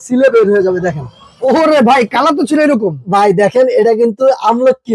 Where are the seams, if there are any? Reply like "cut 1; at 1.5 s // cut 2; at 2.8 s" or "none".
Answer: none

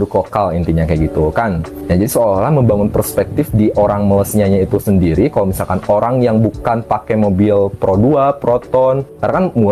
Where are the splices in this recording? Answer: none

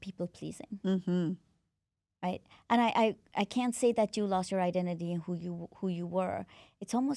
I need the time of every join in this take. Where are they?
none

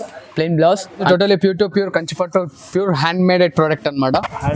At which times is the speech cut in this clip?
cut 1; at 1.0 s

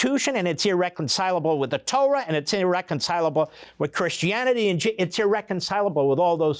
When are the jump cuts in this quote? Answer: none

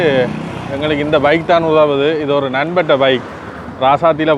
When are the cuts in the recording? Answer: none

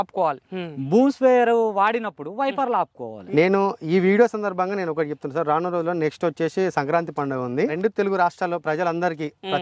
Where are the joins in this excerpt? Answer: cut 1; at 3.1 s // cut 2; at 7.7 s

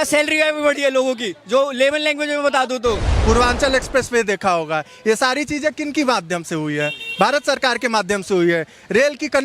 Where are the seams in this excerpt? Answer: cut 1; at 3.1 s

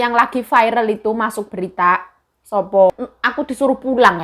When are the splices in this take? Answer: cut 1; at 2.9 s

